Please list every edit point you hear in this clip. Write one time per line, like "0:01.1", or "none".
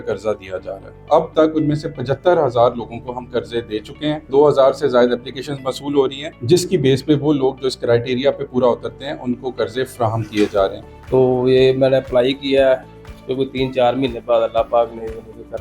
0:01.0
0:04.3
0:06.3
0:10.9